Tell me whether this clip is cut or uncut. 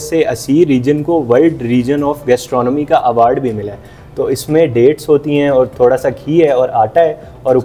uncut